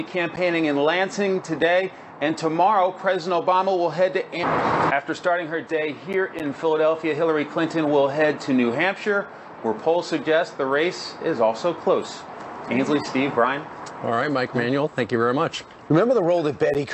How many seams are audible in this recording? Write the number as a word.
zero